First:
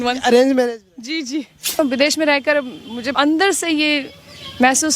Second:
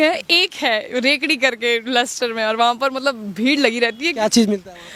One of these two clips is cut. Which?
first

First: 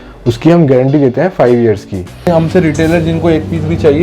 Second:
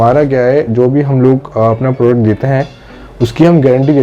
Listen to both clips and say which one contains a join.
first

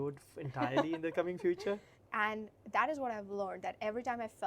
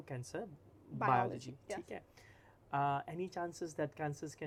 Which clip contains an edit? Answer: first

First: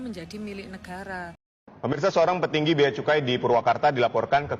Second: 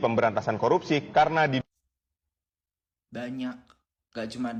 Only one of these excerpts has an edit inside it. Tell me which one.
first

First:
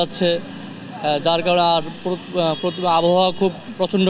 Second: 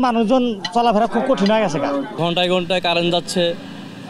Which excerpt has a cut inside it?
second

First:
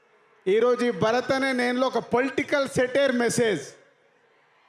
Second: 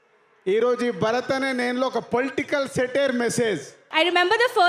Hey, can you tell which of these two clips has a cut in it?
second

